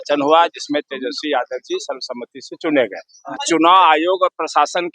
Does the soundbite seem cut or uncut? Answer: cut